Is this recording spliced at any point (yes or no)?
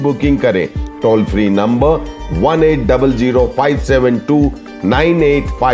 no